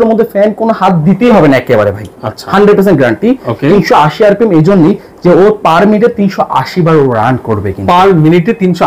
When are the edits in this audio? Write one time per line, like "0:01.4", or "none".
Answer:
none